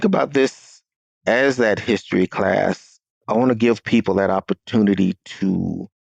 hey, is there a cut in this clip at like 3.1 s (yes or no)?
yes